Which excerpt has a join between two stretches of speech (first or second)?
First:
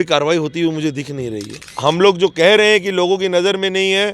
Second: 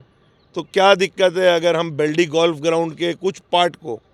first